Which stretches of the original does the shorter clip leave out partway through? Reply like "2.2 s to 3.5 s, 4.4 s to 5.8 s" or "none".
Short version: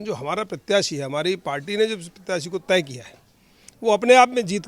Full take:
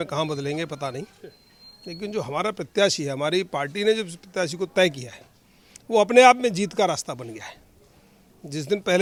none